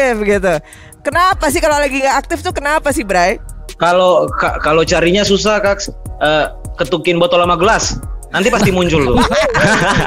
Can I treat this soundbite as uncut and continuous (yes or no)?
yes